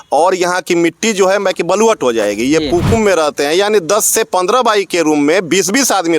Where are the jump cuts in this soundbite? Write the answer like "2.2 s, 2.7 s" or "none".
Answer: 2.9 s